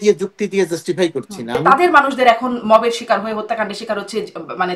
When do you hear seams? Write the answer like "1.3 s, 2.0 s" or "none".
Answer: 1.6 s